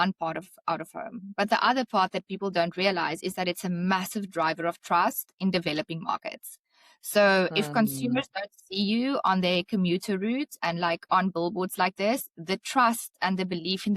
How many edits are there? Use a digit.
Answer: 0